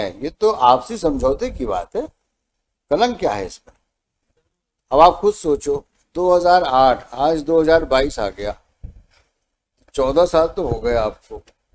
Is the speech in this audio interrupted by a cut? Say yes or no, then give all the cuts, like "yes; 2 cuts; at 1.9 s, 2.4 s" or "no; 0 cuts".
no; 0 cuts